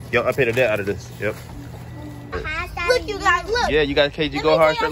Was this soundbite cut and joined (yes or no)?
yes